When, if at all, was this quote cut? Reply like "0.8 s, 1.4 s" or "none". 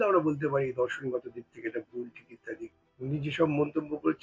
2.8 s